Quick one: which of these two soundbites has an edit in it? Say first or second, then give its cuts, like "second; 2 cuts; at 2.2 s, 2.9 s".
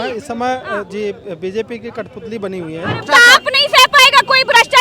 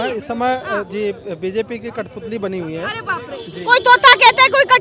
first; 1 cut; at 3.0 s